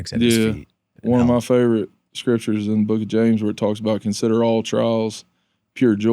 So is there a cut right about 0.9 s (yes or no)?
yes